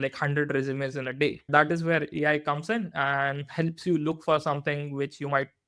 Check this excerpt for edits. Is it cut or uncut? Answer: cut